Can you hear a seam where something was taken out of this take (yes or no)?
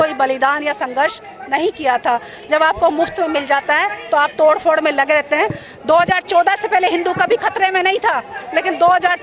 no